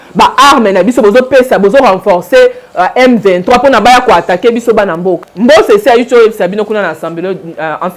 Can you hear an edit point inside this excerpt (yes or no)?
yes